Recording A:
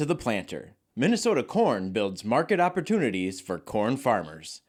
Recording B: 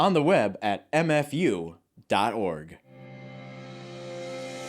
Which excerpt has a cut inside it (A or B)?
B